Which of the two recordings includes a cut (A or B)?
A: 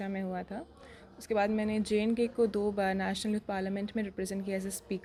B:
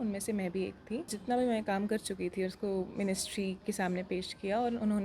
B